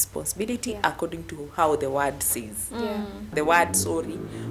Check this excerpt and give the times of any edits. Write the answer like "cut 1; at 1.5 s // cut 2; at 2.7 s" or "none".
cut 1; at 3.3 s

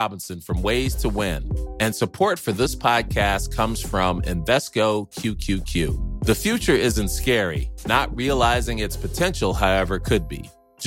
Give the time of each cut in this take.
none

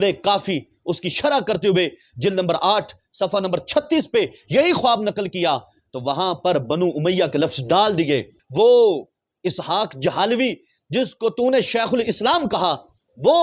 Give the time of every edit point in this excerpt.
cut 1; at 8.4 s

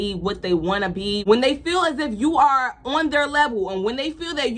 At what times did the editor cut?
cut 1; at 1.2 s

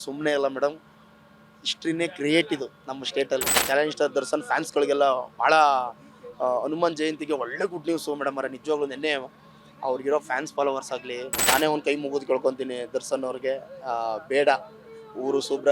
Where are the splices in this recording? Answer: cut 1; at 3.5 s // cut 2; at 11.4 s

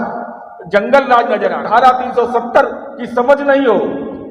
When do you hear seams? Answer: cut 1; at 1.6 s

